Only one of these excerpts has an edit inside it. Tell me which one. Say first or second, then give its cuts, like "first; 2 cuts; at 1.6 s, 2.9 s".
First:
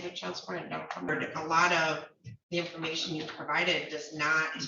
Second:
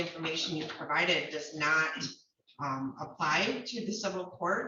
first; 1 cut; at 1.1 s